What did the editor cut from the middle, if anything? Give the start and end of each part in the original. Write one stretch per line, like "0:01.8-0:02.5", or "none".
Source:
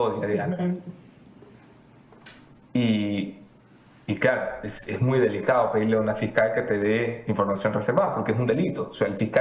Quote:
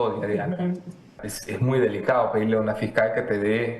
0:01.3-0:04.7